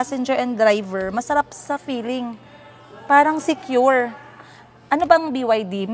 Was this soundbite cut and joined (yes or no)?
no